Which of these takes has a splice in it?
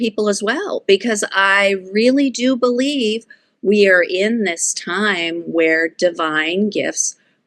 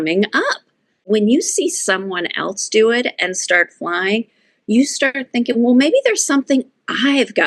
second; 1 cut; at 1.0 s

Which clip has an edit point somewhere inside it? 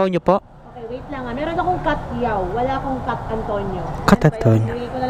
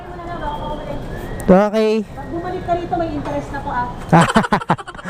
second; 1 cut; at 2.2 s

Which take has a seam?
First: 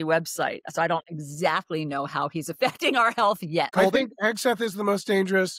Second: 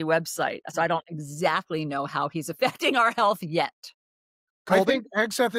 first; 1 cut; at 3.7 s

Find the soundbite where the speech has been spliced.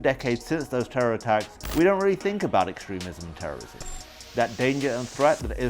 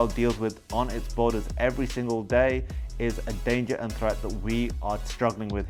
first; 2 cuts; at 1.6 s, 3.9 s

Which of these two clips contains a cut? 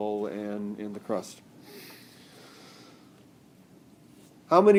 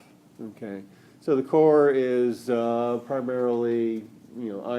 second; 1 cut; at 3.1 s

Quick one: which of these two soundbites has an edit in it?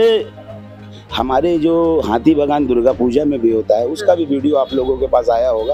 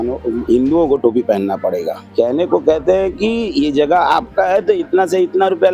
second; 1 cut; at 2.0 s

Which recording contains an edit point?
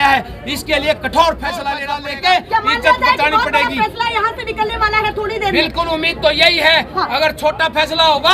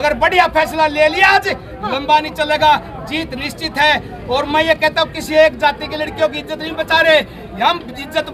first; 1 cut; at 1.9 s

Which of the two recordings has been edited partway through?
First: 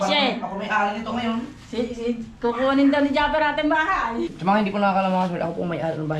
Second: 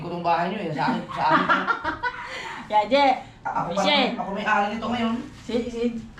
first; 1 cut; at 4.3 s

